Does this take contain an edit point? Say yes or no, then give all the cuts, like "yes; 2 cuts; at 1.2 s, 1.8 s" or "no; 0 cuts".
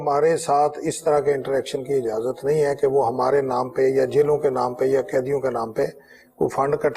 no; 0 cuts